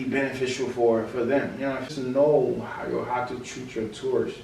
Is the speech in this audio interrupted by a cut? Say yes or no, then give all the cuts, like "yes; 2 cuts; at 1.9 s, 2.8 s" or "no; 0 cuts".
yes; 1 cut; at 1.9 s